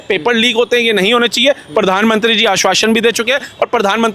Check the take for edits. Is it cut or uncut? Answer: uncut